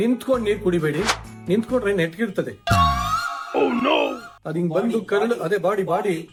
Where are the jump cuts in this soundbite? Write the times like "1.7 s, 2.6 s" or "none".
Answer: none

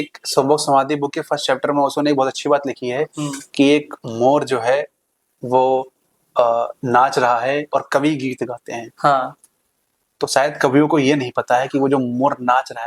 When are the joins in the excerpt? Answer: none

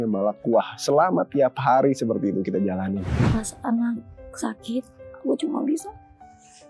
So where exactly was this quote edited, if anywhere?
3.2 s

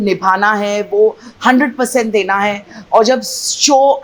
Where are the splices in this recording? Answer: none

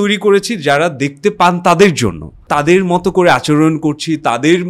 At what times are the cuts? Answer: 2.3 s

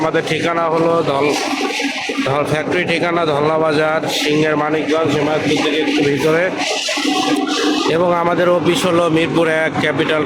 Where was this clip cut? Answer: none

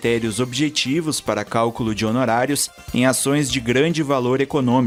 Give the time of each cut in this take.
none

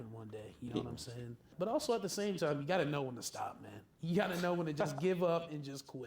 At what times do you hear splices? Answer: 1.5 s

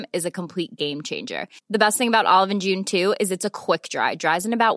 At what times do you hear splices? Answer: none

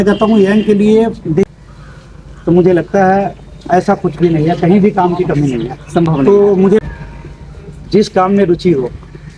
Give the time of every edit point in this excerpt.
1.5 s, 6.8 s

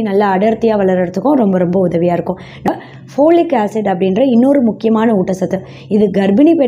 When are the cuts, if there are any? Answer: 2.7 s

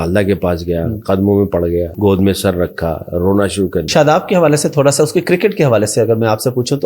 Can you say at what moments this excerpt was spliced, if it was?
1.9 s, 3.9 s

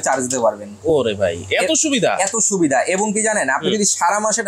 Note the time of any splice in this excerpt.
none

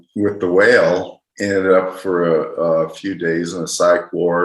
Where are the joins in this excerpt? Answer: 1.3 s

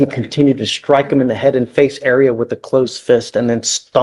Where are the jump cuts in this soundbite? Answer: none

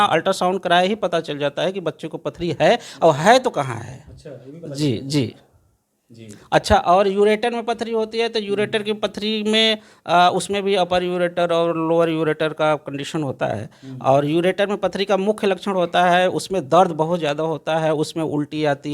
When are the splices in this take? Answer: none

